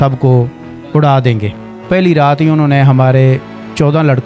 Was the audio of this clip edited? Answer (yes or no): yes